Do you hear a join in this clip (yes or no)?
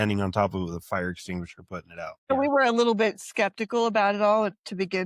yes